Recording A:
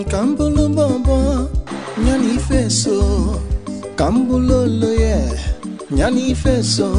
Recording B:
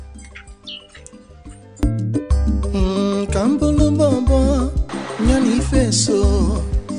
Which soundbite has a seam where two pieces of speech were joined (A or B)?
B